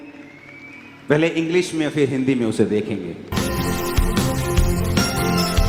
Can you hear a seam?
yes; 1 cut; at 3.3 s

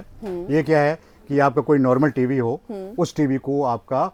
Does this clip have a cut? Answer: no; 0 cuts

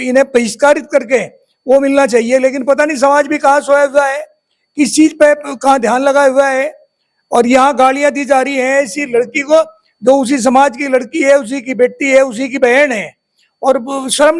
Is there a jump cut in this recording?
no; 0 cuts

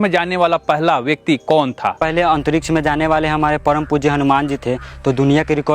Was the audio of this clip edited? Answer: yes; 1 cut; at 2.0 s

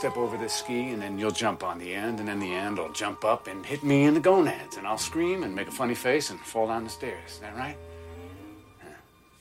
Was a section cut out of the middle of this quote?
no; 0 cuts

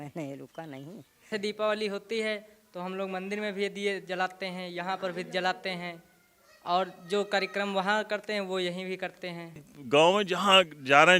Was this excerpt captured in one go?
no; 2 cuts; at 1.3 s, 9.7 s

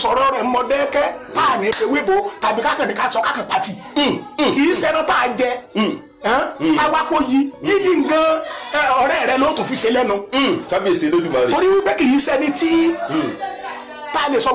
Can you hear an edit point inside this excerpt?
no; 0 cuts

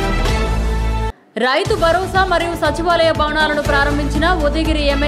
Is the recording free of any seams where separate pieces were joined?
no; 1 cut; at 1.2 s

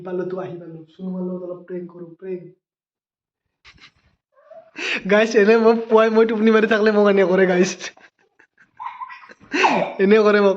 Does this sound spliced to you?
yes; 1 cut; at 3.7 s

